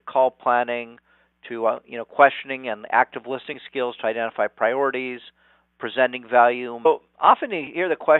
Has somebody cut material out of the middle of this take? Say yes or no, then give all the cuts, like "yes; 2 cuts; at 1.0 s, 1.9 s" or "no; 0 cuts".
no; 0 cuts